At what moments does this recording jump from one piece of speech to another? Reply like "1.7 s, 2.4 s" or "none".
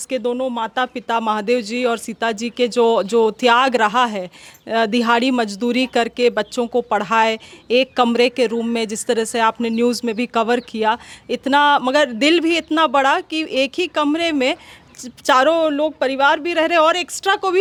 none